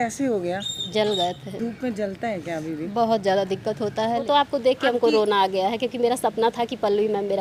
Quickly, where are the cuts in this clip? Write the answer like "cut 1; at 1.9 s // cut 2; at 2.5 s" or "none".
cut 1; at 1.6 s // cut 2; at 4.2 s